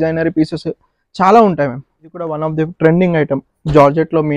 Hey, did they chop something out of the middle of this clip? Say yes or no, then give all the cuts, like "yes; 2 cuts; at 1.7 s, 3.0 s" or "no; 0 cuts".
yes; 1 cut; at 2.4 s